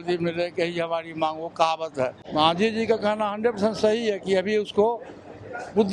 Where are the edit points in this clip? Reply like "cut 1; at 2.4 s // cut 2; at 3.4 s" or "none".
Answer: cut 1; at 2.2 s